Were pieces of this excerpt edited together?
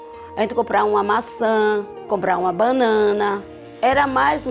yes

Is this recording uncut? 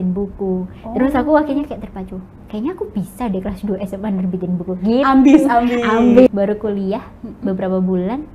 no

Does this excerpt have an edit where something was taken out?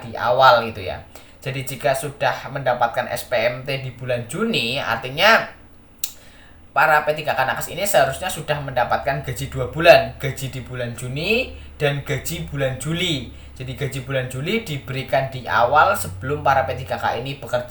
no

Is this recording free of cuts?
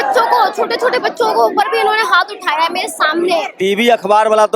no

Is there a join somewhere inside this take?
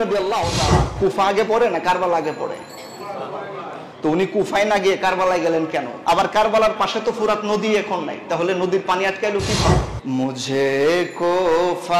yes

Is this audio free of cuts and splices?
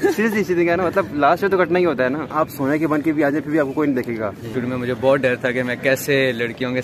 no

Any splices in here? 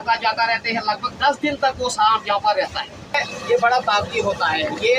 yes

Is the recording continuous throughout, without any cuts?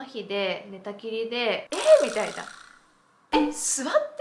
no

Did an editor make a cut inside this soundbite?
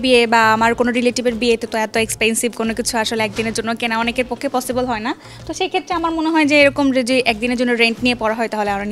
no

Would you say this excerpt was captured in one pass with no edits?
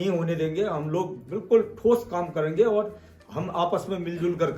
yes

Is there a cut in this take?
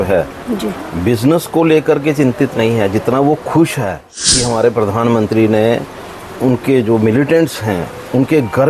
yes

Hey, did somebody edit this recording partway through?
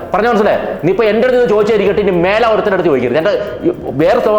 no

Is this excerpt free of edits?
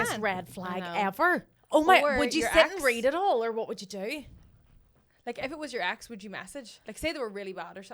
yes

